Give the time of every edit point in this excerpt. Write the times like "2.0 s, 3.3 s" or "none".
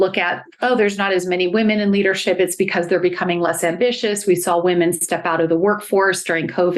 none